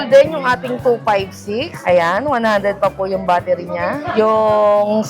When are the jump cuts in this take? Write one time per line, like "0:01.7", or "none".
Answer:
0:01.7
0:04.1

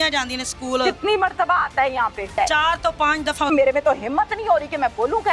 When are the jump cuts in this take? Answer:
0:02.3
0:03.5

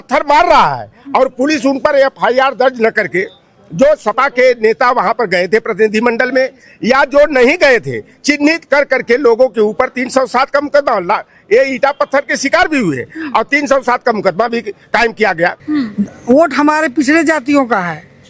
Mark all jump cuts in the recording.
0:15.6

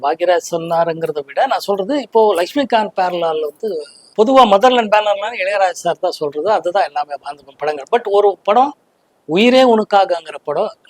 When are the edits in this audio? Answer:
0:03.9

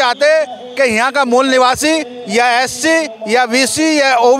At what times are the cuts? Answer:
none

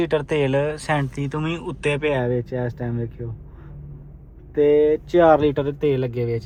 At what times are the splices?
none

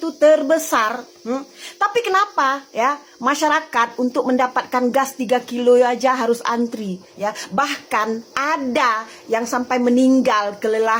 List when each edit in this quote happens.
none

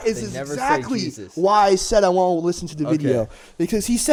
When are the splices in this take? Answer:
none

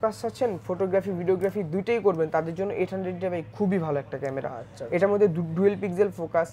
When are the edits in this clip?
none

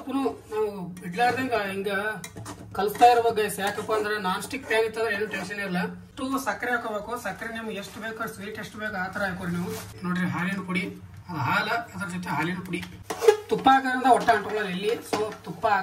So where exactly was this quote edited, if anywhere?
0:06.1
0:09.9
0:13.0

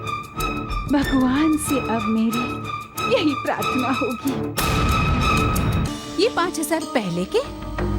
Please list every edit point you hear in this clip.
0:05.9

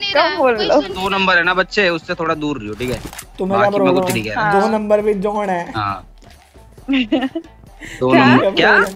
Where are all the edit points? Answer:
0:01.0

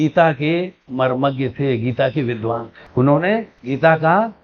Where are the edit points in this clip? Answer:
none

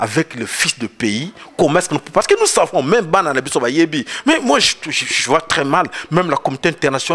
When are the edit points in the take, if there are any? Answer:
none

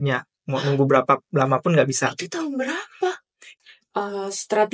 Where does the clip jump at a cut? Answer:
0:03.5

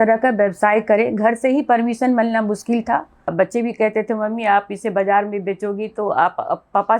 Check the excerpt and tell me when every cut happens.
0:03.3

